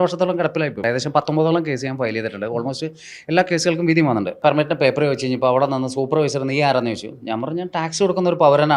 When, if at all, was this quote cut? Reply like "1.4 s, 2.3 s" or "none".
0.8 s, 4.4 s

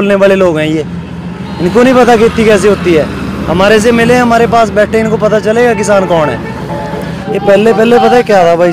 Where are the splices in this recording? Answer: 7.2 s

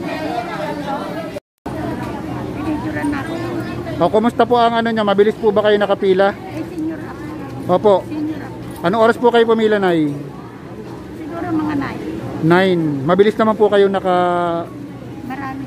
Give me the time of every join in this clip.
1.6 s

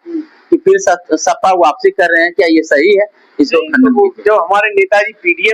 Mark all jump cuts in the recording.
none

